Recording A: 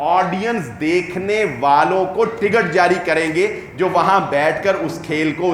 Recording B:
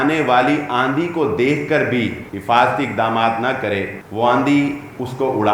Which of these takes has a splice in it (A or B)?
B